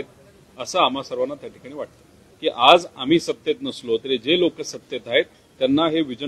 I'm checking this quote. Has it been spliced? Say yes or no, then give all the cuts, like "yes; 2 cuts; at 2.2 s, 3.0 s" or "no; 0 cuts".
yes; 1 cut; at 2.2 s